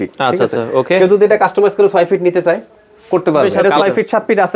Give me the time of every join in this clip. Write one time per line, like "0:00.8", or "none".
0:03.5